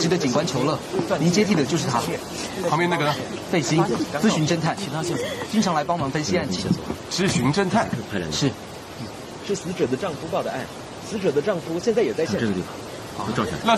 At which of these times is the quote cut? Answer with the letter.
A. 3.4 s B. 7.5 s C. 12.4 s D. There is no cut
C